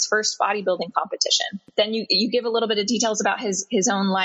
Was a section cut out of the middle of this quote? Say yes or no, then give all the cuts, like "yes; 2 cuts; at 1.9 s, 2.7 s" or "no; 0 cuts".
yes; 1 cut; at 1.7 s